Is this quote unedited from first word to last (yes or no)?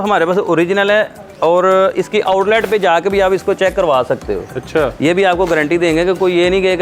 yes